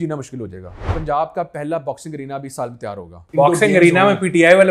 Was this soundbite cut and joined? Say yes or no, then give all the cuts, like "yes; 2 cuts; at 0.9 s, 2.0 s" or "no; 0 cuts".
yes; 2 cuts; at 0.9 s, 3.2 s